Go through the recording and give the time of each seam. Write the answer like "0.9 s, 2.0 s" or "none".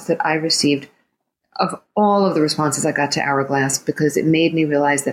none